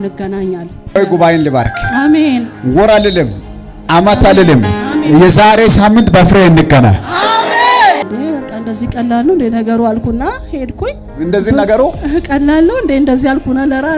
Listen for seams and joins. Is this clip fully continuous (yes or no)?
no